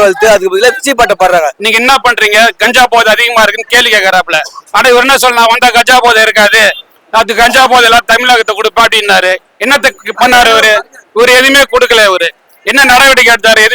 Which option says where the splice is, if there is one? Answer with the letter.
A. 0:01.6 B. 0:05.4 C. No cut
A